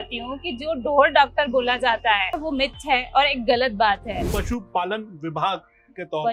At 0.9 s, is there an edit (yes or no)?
no